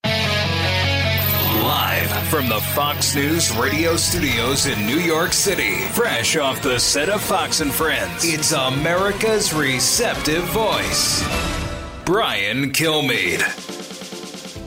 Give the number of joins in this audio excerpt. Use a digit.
2